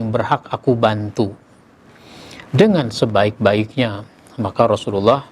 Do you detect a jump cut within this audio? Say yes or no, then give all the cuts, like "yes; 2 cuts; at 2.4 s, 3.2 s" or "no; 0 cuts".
no; 0 cuts